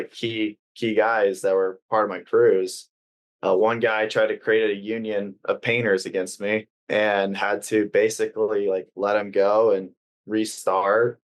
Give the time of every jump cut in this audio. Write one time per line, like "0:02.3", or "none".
0:06.8